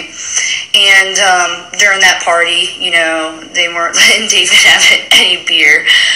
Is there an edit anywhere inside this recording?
no; 0 cuts

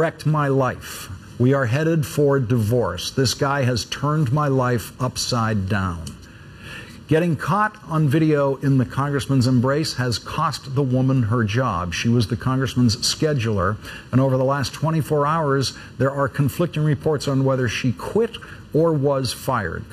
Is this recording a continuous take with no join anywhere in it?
yes; 0 cuts

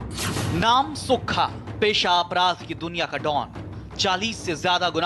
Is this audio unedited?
yes; 0 cuts

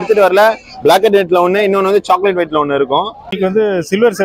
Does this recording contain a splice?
yes; 1 cut; at 3.3 s

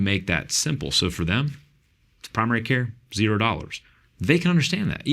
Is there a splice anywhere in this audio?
no; 0 cuts

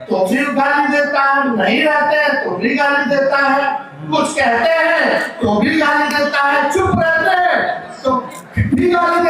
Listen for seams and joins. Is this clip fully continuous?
yes; 0 cuts

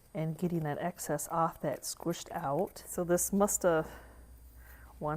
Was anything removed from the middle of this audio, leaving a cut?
yes; 1 cut; at 2.8 s

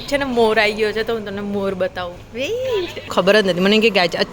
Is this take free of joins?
no; 1 cut; at 3.1 s

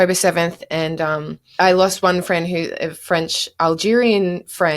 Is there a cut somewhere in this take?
yes; 1 cut; at 1.5 s

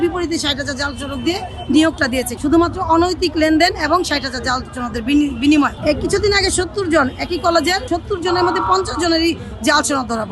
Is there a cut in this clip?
yes; 3 cuts; at 2.3 s, 5.8 s, 7.9 s

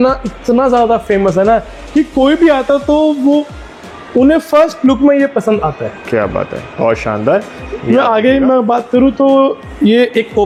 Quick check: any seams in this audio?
no; 0 cuts

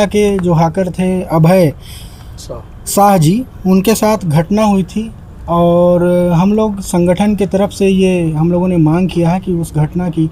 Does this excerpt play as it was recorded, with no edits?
yes; 0 cuts

